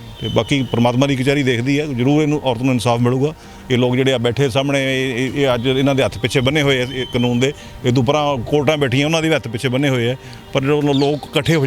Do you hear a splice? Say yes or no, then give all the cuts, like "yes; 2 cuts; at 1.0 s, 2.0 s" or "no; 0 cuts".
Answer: no; 0 cuts